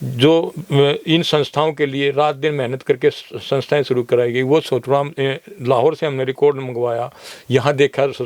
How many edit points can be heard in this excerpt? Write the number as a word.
zero